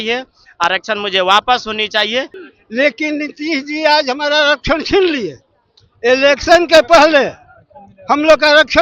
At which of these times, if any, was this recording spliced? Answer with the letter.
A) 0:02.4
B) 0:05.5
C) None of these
A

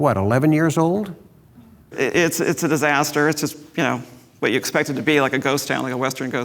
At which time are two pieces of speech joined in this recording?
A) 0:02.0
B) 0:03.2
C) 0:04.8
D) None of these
A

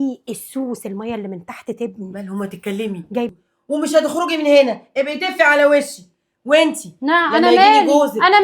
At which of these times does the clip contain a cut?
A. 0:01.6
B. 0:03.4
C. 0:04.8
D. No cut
B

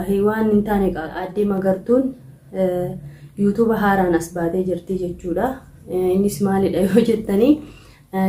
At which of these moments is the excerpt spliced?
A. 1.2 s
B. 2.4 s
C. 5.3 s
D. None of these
A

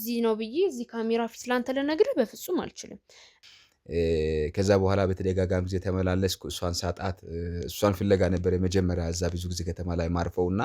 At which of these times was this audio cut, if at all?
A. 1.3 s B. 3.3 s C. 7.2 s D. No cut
B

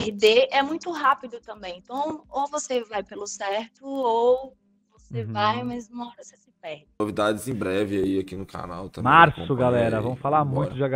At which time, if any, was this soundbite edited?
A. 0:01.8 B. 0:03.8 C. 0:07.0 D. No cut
C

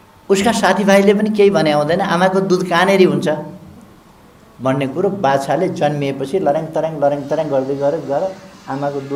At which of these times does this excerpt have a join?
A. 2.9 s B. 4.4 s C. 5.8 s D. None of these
D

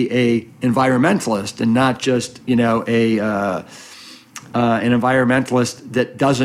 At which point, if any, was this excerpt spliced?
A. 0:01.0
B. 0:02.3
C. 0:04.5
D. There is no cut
D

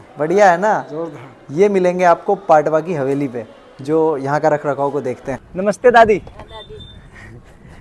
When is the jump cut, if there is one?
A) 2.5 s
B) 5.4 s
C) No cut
B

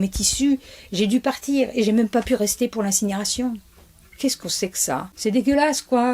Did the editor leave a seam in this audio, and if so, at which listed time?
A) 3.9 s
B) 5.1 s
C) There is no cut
B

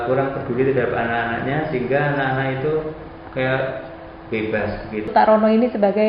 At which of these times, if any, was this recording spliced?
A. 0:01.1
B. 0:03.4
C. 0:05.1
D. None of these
C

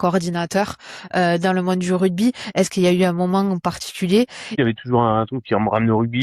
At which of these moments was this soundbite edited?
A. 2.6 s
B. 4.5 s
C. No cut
B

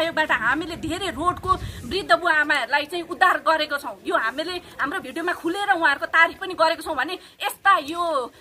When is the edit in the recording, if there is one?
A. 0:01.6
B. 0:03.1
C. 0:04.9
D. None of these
D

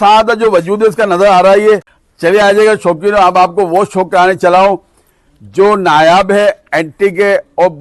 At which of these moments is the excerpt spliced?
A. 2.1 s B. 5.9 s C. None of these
A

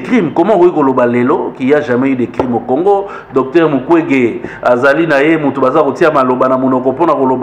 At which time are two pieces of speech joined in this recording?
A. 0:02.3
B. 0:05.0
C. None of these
C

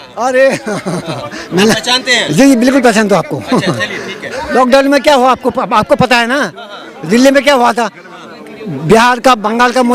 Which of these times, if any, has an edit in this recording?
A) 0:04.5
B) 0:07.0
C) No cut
A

